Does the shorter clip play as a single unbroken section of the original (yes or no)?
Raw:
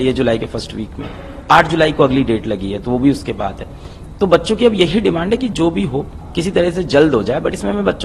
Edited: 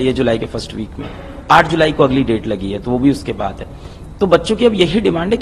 yes